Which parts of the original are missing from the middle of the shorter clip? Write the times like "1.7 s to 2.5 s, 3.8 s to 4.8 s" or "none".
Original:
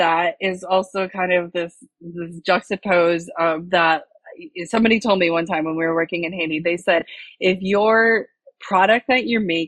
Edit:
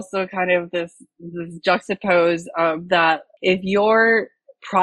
4.1 s to 7.3 s